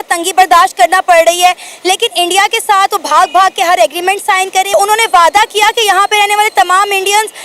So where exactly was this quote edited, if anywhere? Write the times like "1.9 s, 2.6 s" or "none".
4.7 s